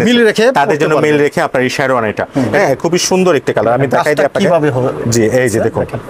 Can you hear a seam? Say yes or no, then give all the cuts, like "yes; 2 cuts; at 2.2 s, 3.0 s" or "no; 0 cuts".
yes; 1 cut; at 2.6 s